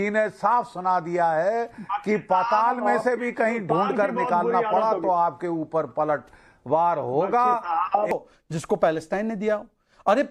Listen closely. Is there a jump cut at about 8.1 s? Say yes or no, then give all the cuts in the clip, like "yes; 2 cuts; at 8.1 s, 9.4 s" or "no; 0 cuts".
yes; 1 cut; at 8.1 s